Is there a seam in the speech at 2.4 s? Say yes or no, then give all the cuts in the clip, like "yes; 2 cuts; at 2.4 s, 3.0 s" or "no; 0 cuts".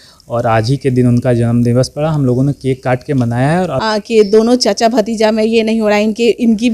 no; 1 cut; at 3.8 s